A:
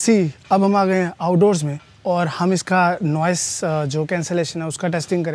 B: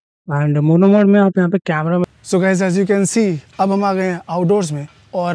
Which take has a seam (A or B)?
B